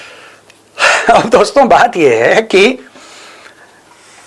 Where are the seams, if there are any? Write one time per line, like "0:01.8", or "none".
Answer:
none